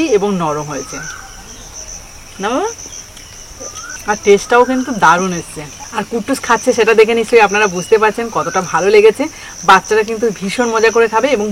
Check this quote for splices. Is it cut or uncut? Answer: uncut